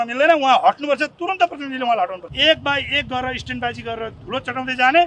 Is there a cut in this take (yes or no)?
yes